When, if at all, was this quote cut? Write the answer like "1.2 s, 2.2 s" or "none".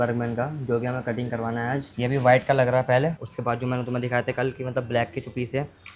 2.0 s

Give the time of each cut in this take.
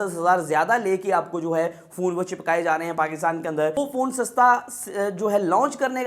3.8 s

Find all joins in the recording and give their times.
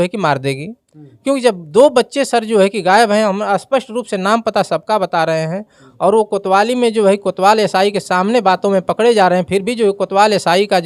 none

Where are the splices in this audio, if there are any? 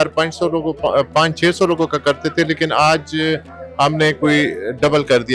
none

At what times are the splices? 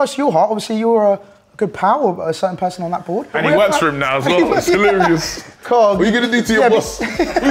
3.3 s

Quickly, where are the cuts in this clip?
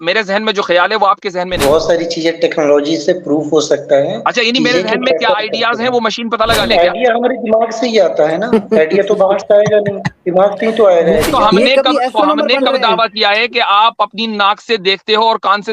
1.5 s, 6.6 s, 11.3 s

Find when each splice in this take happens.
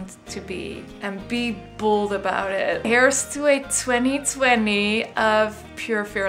0.9 s, 2.9 s

